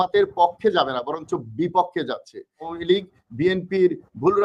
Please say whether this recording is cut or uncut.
cut